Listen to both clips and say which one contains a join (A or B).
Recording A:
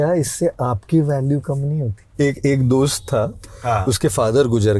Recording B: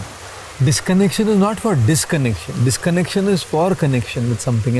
A